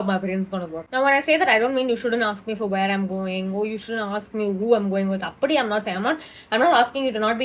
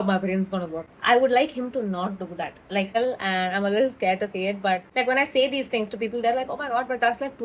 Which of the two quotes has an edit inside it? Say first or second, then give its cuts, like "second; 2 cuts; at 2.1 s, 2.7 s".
second; 3 cuts; at 0.8 s, 2.9 s, 4.9 s